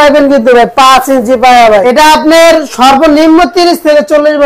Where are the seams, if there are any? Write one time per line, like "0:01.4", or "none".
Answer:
0:01.8